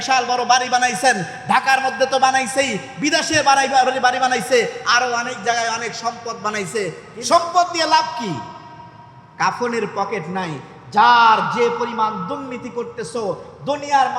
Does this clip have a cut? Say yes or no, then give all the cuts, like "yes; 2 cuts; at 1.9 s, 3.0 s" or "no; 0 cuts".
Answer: yes; 1 cut; at 7.1 s